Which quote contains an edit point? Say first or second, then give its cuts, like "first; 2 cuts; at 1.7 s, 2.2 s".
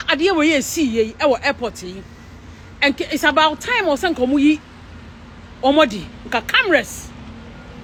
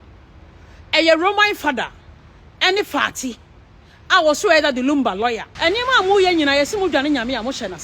second; 1 cut; at 5.5 s